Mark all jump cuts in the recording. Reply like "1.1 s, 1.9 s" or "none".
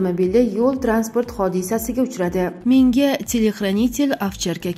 2.6 s